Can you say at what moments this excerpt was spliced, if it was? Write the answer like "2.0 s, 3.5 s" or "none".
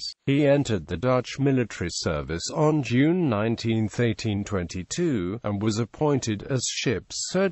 5.3 s